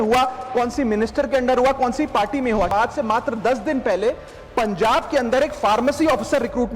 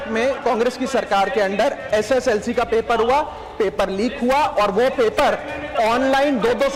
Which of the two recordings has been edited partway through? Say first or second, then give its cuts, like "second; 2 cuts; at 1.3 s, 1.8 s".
first; 1 cut; at 2.7 s